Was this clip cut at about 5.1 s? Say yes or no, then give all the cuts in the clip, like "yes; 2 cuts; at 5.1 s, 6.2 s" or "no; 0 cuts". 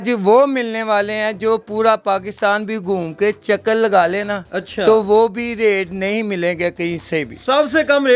no; 0 cuts